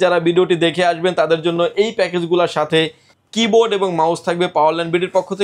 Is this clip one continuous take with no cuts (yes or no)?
yes